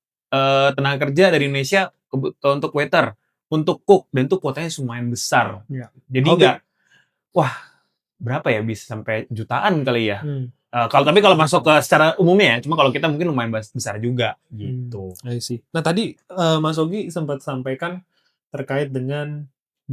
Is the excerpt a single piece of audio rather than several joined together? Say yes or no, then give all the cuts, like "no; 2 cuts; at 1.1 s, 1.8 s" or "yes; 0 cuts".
yes; 0 cuts